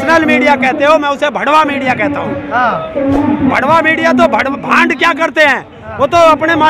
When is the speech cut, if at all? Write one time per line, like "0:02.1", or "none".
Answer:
none